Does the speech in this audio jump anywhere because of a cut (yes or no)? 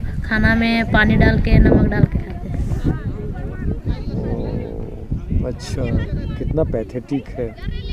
no